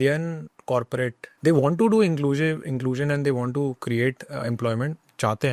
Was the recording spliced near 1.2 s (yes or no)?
yes